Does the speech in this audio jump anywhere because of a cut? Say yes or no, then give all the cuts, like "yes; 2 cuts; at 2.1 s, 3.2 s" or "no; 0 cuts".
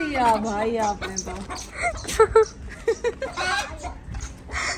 no; 0 cuts